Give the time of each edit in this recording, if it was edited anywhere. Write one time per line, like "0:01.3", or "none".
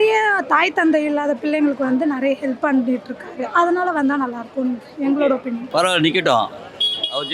0:05.6